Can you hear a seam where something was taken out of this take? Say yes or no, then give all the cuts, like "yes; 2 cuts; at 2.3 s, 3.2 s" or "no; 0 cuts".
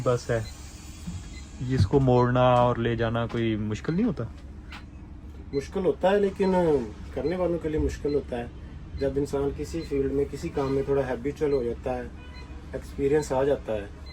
no; 0 cuts